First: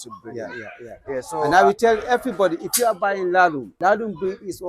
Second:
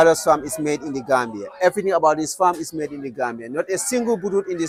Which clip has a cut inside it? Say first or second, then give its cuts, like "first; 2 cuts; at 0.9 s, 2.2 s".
first; 1 cut; at 3.7 s